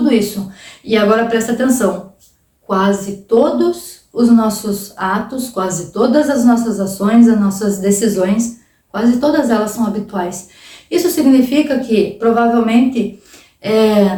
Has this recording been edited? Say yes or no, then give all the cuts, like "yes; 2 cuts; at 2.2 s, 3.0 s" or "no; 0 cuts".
no; 0 cuts